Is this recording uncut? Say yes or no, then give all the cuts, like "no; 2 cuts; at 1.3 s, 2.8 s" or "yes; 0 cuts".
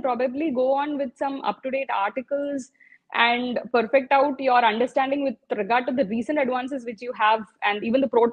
yes; 0 cuts